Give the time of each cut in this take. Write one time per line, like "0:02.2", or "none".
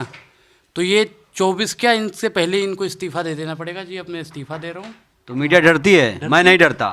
none